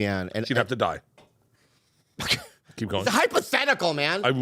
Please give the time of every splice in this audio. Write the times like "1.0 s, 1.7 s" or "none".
none